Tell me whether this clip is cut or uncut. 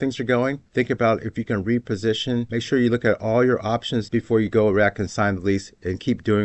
cut